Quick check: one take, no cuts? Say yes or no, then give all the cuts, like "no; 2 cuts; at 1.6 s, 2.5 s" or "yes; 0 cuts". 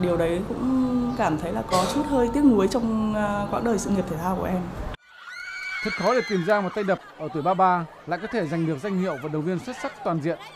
yes; 0 cuts